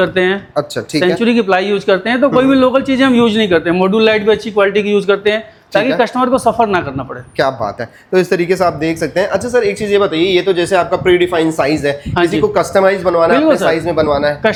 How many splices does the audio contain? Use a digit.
0